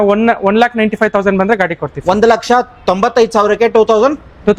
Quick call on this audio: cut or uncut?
uncut